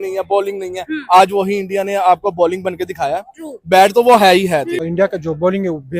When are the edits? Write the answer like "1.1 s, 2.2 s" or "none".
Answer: 4.8 s